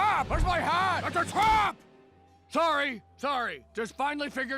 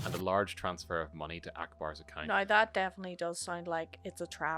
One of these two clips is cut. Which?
second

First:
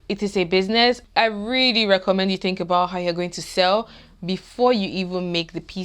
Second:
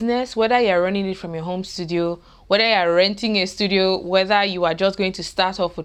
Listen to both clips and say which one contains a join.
first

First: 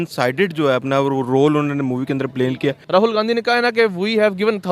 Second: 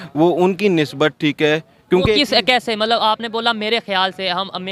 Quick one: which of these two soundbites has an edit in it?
first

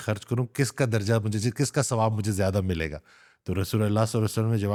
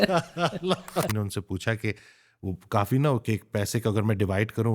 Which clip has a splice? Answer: second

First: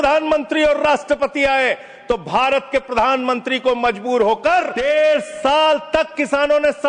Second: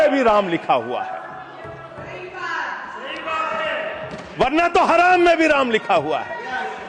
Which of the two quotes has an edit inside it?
first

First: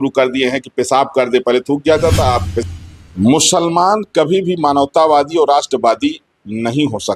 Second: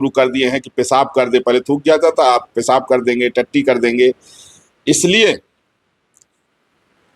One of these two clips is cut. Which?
first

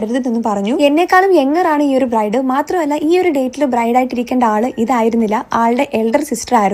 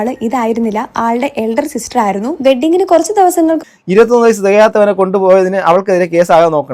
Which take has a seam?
second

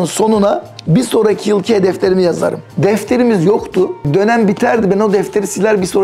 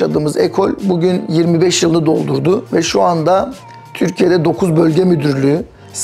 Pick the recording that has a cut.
first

